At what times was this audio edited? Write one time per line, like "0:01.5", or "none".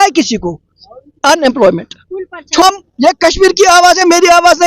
0:02.6